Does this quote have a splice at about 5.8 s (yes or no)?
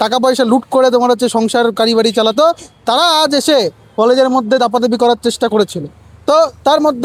no